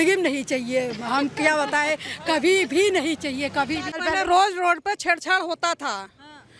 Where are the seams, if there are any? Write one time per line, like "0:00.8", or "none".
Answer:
0:03.9